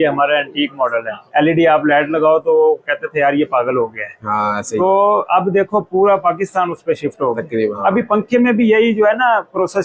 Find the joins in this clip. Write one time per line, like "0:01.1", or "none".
0:01.2
0:07.8